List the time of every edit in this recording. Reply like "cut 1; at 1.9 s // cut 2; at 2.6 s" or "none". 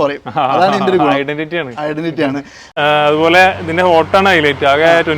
cut 1; at 2.7 s